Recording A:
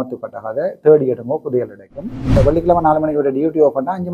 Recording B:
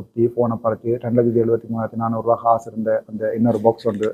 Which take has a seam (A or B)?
A